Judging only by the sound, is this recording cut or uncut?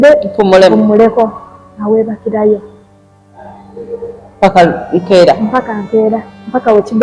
uncut